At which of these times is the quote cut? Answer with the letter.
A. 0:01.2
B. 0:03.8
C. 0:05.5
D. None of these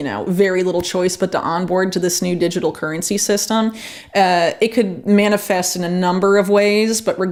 D